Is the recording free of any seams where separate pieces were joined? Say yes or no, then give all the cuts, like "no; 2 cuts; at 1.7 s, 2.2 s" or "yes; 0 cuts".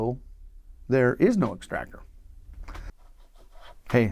no; 1 cut; at 2.9 s